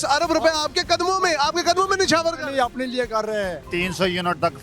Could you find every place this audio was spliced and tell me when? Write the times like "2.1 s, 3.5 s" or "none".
3.7 s